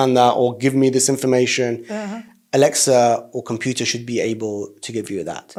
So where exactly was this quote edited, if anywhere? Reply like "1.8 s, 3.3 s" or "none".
none